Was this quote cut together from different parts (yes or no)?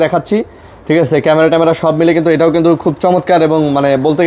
no